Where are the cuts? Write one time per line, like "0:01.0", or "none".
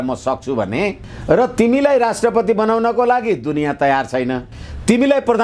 0:01.0
0:04.5